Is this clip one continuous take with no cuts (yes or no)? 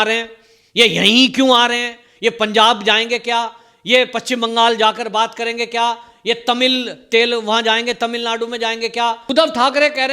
no